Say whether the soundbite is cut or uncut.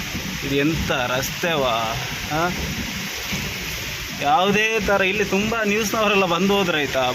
uncut